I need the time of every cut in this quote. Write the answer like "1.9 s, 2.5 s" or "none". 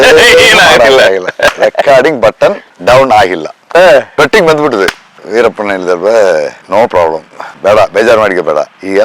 2.7 s, 4.1 s